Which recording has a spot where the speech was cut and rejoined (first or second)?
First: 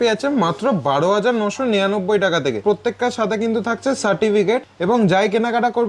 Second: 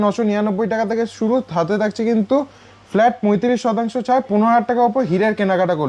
first